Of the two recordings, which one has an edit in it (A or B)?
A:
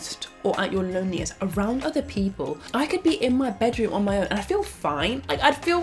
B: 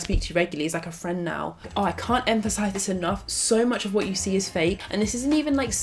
B